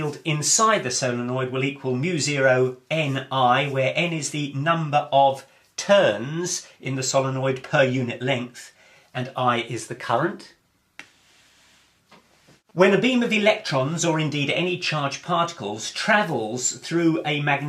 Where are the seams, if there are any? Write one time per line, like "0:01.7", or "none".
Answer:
0:10.2